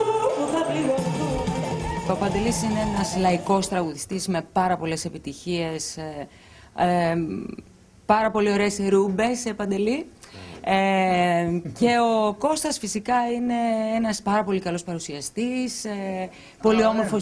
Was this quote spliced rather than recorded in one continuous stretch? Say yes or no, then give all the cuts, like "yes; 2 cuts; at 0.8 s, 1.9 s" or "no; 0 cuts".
no; 0 cuts